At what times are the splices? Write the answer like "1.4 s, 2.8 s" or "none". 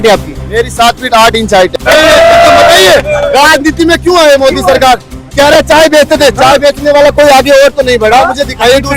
1.8 s

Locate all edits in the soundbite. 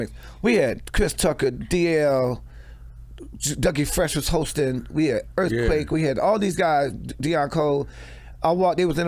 none

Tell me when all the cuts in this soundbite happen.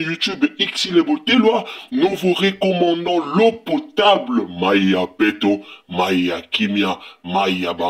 none

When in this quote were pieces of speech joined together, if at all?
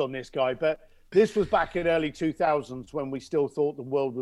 none

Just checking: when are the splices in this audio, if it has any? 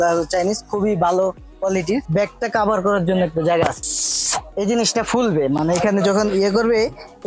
2.1 s, 3.9 s

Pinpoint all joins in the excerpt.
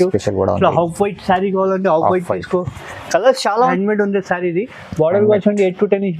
3.7 s

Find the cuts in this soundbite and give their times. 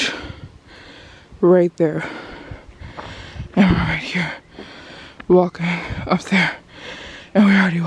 none

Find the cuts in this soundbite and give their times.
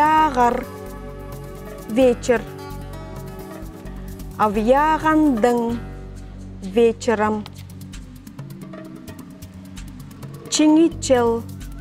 7.5 s, 10.5 s

